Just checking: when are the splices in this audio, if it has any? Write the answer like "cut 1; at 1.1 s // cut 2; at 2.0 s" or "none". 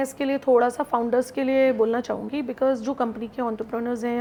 none